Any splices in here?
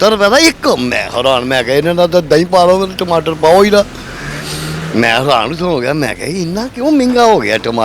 no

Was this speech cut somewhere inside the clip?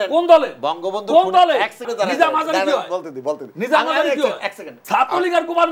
yes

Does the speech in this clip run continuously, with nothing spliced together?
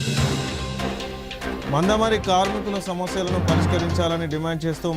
no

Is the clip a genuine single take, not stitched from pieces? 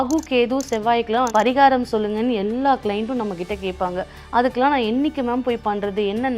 no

